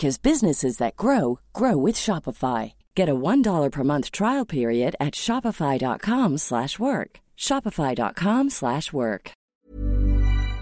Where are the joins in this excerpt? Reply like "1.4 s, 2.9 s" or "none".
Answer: 9.5 s